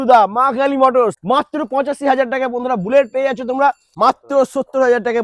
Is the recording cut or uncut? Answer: cut